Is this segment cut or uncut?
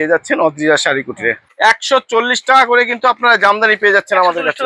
cut